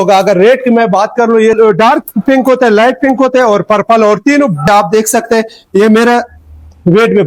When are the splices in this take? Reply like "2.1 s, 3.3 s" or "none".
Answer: 1.6 s, 4.7 s